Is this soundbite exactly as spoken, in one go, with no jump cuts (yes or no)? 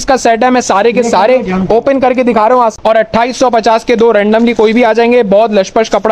no